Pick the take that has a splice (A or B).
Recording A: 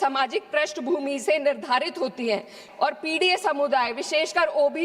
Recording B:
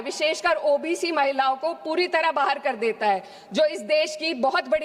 A